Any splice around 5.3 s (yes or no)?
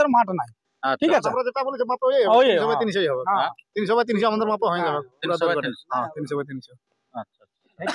no